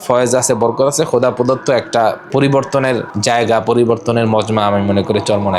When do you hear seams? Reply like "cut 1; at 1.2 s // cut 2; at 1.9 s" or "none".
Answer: cut 1; at 2.2 s // cut 2; at 3.1 s